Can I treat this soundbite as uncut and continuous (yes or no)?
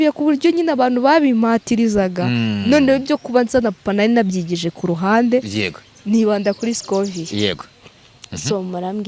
yes